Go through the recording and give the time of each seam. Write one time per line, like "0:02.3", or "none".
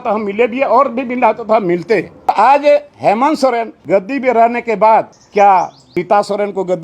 0:02.3
0:03.7
0:05.2
0:05.8